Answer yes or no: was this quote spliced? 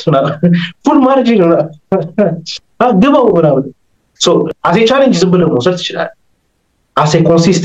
yes